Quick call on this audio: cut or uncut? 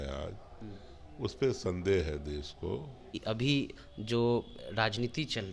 cut